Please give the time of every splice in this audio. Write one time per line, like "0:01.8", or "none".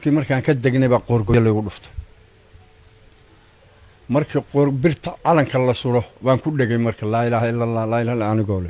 0:01.3